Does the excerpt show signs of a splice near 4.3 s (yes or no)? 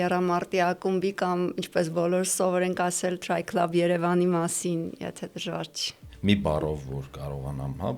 no